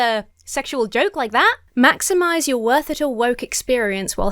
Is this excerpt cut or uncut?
cut